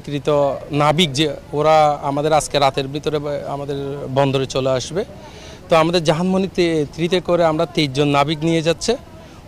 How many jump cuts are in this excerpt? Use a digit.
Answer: 0